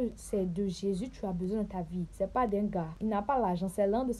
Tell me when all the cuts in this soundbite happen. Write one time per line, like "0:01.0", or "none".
0:02.1
0:02.9